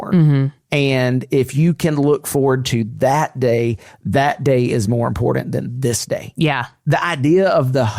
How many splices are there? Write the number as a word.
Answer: one